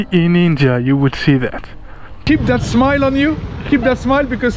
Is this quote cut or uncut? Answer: cut